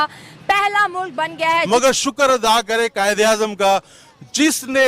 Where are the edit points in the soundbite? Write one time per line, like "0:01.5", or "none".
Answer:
0:01.7